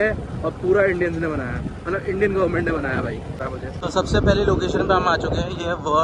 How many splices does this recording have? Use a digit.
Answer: 1